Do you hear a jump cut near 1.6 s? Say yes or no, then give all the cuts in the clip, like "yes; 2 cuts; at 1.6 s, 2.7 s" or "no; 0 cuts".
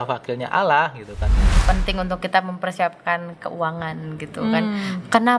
yes; 1 cut; at 1.6 s